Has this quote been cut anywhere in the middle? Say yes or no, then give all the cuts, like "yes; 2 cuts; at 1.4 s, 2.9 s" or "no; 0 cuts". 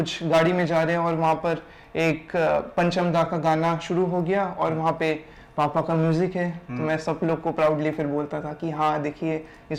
no; 0 cuts